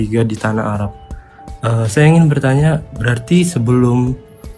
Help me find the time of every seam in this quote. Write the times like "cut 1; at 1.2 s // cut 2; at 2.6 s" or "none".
none